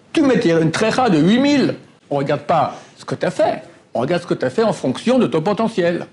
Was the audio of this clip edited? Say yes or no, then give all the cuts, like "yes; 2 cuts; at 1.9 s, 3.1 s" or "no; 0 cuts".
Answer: yes; 1 cut; at 2.0 s